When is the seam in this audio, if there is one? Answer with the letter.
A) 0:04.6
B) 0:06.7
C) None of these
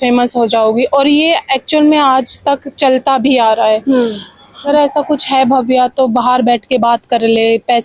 A